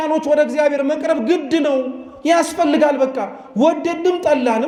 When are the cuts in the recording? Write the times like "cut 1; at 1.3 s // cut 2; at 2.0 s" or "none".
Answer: none